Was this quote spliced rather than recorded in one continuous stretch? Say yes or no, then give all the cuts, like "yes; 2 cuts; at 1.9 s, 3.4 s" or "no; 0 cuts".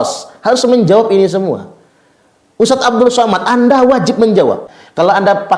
yes; 1 cut; at 4.6 s